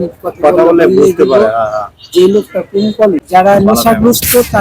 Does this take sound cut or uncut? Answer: cut